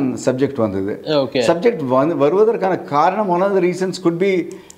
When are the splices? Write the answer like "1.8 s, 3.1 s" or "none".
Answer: none